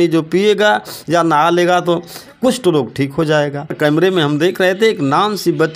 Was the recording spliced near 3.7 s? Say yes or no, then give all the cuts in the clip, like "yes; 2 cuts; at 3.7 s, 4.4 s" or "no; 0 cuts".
yes; 1 cut; at 3.7 s